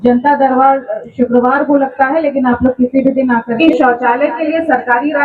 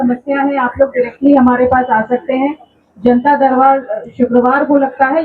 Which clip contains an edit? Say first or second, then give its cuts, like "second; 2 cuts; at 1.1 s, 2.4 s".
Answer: first; 1 cut; at 3.6 s